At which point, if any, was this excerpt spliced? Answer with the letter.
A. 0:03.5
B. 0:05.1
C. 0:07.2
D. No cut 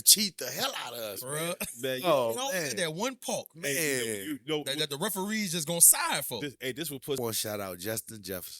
C